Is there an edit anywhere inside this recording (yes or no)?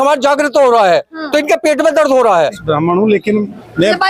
yes